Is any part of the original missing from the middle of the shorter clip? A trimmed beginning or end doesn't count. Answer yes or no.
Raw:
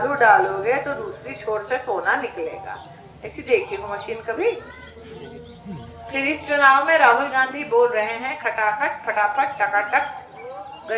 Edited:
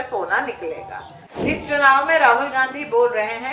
yes